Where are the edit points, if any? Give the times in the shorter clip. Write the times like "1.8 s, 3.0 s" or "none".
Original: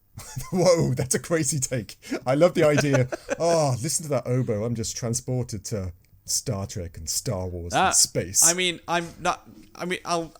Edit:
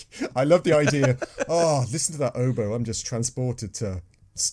none